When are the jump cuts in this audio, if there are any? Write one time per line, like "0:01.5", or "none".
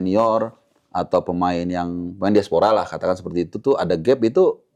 none